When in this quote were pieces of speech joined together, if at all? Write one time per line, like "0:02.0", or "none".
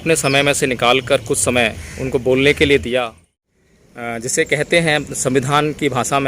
0:03.3